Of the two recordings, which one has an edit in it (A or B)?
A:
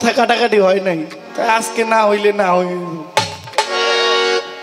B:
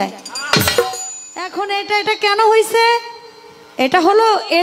B